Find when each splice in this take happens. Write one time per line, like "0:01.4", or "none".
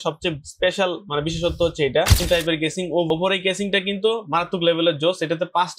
0:02.2
0:03.1